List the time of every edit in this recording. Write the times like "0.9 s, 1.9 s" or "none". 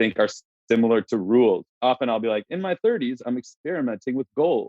1.7 s